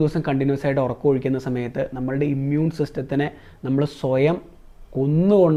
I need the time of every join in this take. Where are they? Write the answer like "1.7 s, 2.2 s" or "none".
none